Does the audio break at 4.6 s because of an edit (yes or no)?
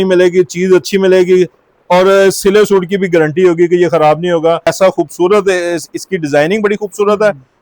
yes